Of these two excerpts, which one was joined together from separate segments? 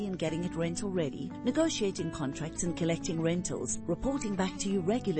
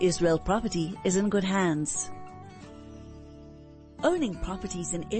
second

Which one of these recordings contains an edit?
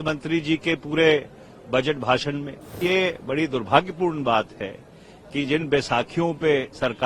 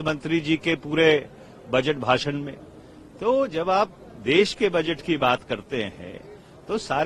first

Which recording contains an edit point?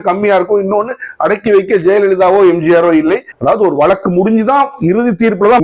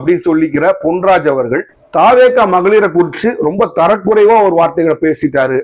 first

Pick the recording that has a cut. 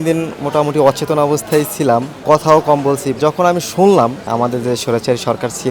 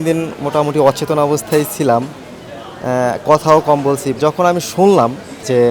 first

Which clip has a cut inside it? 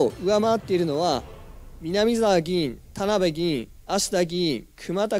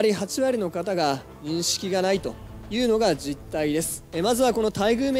second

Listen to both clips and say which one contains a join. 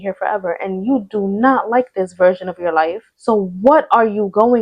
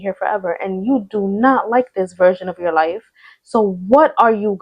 first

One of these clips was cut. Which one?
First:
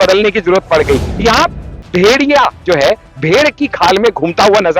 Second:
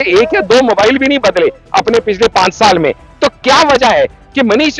first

